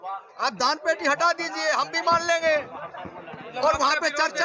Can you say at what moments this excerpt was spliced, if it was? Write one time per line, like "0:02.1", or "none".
none